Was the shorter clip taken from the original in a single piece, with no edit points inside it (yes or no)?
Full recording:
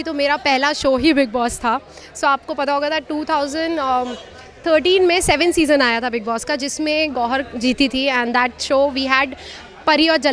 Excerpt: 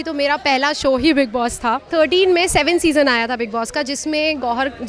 no